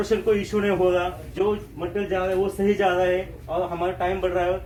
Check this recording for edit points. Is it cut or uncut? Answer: uncut